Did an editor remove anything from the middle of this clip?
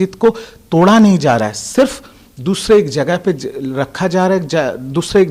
no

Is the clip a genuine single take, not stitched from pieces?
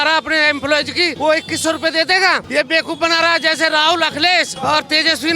no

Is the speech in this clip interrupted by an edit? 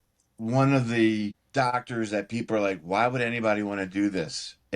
yes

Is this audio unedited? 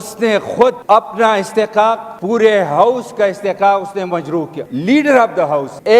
no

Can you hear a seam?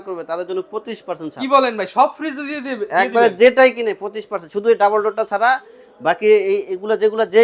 no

